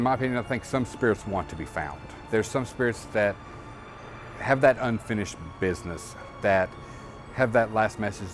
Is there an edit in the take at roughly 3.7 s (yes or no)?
no